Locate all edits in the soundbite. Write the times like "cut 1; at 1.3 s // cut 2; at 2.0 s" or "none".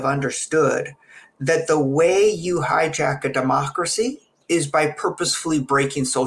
none